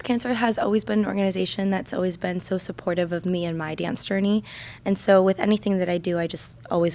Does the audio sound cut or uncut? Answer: uncut